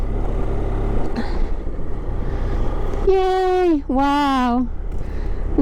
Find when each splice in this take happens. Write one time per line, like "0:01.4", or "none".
none